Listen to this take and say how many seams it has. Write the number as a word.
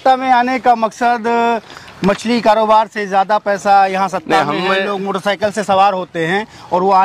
zero